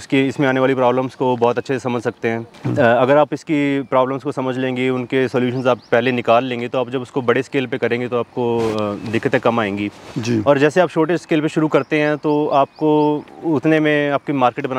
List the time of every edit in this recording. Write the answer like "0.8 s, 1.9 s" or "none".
none